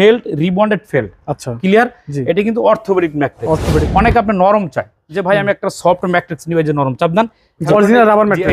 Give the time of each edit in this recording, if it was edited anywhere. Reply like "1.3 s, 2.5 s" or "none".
3.9 s, 7.7 s